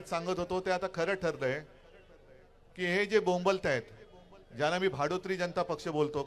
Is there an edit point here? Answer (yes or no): no